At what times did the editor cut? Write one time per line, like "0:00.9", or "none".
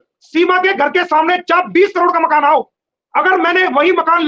none